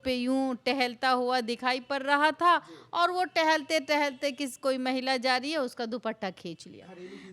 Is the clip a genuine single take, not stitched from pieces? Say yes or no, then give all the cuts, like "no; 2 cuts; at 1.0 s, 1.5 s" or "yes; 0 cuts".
yes; 0 cuts